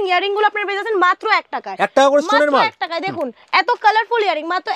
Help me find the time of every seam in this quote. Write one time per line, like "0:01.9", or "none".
none